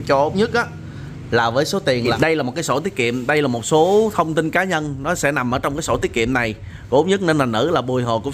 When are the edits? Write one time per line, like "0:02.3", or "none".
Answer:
0:02.1